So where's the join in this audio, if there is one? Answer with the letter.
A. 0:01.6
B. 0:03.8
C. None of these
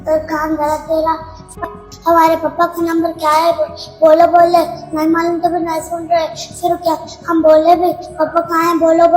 A